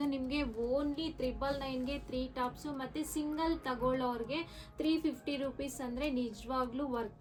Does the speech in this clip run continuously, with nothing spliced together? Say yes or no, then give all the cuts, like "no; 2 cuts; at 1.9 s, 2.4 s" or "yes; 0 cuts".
yes; 0 cuts